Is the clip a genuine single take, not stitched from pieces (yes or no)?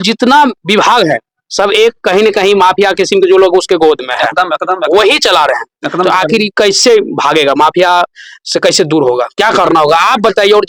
yes